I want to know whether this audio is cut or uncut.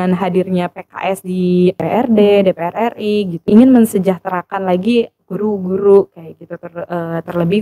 cut